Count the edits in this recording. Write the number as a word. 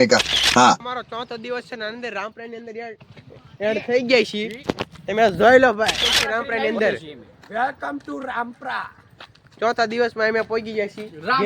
two